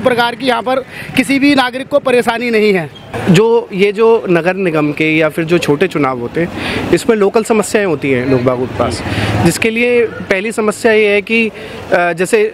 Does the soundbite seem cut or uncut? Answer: cut